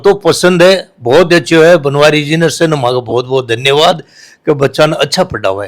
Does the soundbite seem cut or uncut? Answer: uncut